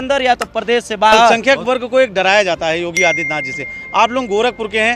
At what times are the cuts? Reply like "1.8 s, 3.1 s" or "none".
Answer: 1.3 s